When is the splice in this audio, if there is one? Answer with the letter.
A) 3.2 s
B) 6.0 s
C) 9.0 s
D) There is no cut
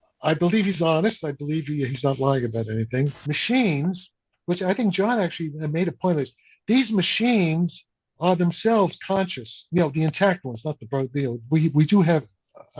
A